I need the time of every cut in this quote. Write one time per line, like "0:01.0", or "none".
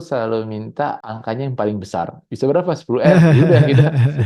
0:01.0